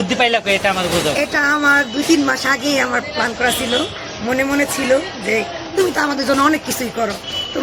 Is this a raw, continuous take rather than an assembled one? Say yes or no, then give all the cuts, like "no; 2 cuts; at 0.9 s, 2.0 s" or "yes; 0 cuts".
yes; 0 cuts